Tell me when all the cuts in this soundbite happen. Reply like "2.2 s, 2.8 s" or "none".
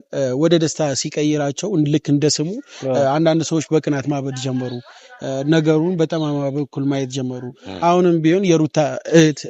none